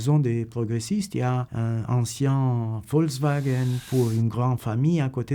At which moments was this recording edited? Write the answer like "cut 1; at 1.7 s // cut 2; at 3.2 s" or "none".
none